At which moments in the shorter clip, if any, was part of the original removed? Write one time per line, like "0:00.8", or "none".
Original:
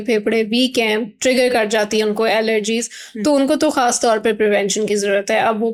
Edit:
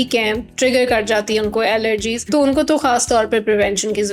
0:02.2